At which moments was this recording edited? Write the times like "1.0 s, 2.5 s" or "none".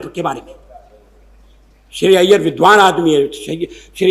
none